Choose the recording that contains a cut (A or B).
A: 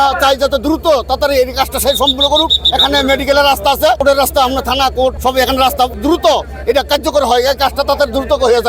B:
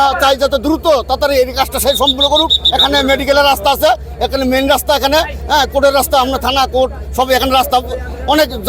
A